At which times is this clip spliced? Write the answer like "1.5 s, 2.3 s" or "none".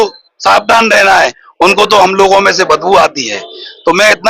1.4 s